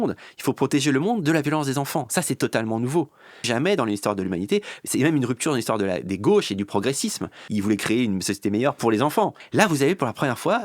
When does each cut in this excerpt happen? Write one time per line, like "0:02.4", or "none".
0:03.5
0:07.4
0:09.4